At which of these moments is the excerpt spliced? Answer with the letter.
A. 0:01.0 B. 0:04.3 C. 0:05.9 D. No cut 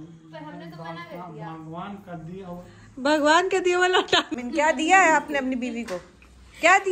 B